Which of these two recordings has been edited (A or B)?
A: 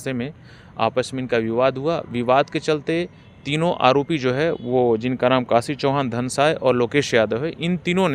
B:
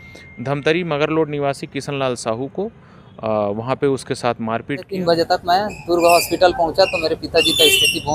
B